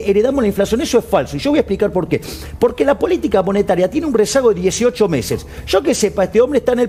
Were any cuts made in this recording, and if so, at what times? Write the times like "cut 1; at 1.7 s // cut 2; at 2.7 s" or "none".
none